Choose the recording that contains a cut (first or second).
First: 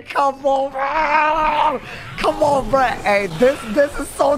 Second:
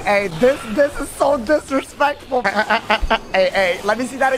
second